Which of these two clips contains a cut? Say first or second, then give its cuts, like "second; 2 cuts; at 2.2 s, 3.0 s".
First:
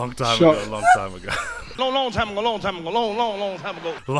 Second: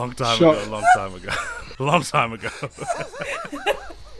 second; 1 cut; at 1.7 s